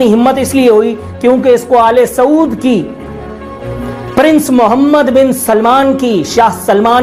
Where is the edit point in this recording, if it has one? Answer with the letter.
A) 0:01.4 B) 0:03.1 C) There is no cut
C